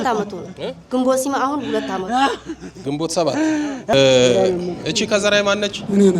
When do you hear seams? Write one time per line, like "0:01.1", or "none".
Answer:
0:03.9